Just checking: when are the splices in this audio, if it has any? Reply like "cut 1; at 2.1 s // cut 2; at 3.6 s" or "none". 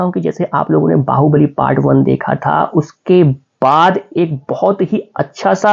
none

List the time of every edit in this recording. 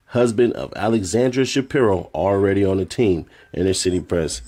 none

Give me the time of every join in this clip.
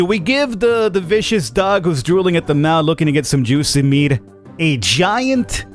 none

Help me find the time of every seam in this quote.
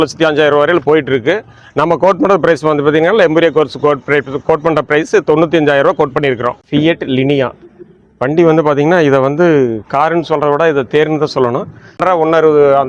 cut 1; at 6.6 s // cut 2; at 12.0 s

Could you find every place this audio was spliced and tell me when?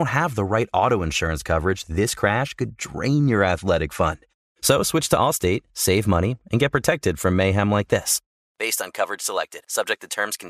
none

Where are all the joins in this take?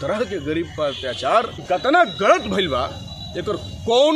cut 1; at 1.6 s

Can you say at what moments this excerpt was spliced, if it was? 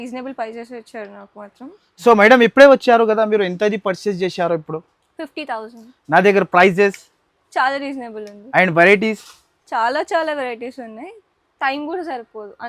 none

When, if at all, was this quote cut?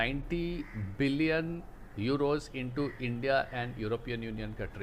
none

